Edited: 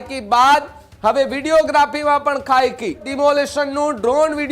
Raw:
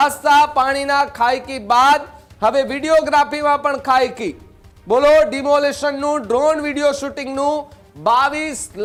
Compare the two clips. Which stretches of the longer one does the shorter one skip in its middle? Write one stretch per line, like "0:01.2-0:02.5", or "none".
0:04.5-0:05.4

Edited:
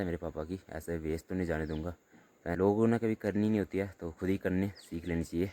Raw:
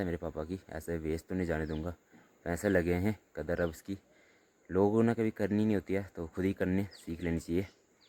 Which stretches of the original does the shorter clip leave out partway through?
0:02.6-0:04.7

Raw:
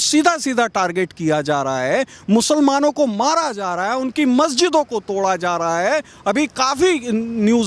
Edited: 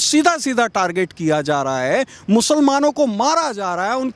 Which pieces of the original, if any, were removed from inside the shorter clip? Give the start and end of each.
none

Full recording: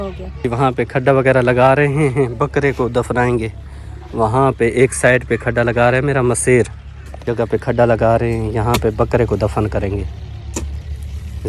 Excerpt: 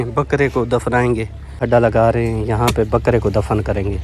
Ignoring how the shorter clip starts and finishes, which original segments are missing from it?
0:03.8-0:07.7

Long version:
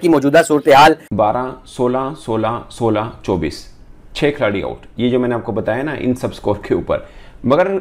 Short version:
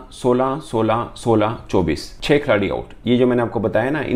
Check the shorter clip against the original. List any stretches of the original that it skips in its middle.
0:03.6-0:04.0

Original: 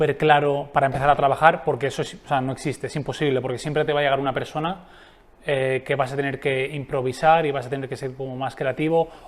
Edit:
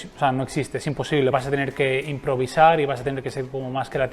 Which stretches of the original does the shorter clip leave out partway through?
0:03.4-0:06.0

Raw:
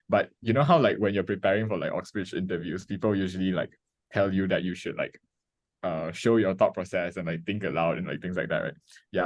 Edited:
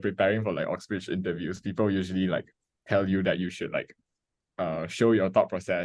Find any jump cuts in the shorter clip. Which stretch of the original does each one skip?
none

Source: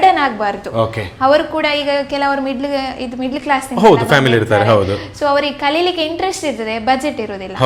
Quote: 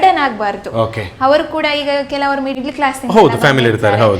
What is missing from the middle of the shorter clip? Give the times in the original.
0:02.6-0:03.2

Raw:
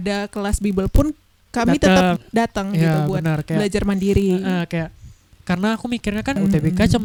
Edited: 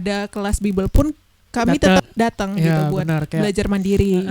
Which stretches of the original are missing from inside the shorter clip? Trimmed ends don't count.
0:02.0-0:02.2

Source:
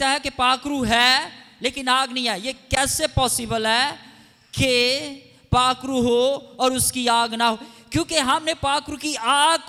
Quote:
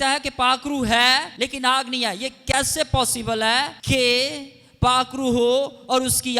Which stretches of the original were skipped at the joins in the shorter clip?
0:01.3-0:01.5
0:04.0-0:04.5

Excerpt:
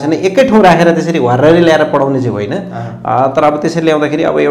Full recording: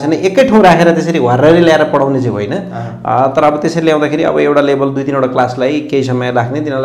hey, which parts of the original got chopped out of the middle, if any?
none

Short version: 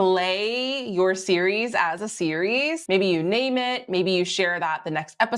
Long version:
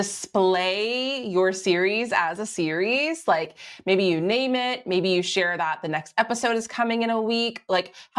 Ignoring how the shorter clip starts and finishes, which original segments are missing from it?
0:03.2-0:03.8

